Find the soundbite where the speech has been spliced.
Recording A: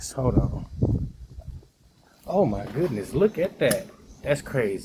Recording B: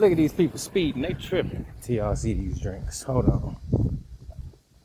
B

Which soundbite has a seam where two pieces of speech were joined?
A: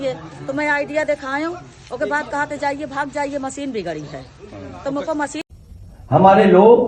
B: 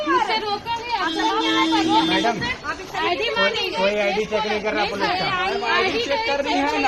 A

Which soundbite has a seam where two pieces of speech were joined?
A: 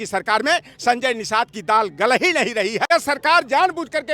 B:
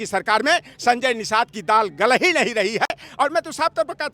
A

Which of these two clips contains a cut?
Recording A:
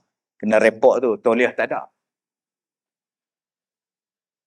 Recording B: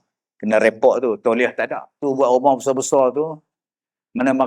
B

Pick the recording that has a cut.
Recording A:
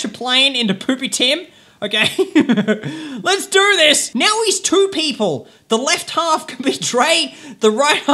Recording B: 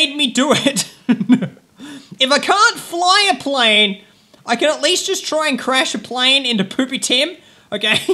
A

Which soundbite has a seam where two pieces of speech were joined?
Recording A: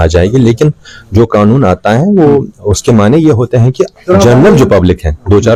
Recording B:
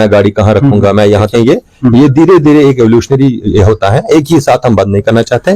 B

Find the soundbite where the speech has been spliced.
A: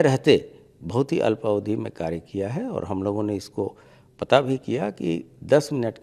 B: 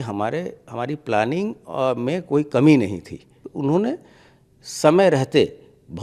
B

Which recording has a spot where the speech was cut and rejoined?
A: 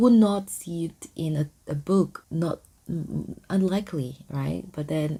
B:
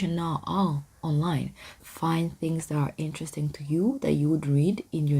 B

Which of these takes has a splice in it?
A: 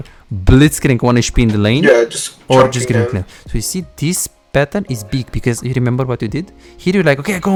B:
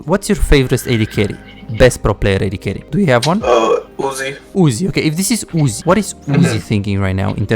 B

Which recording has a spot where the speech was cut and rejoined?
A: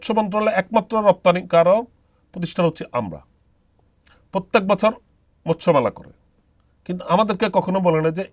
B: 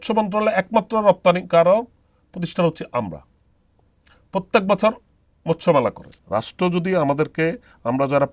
B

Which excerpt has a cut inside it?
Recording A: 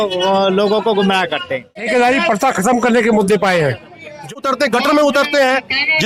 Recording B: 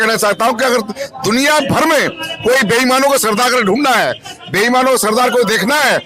A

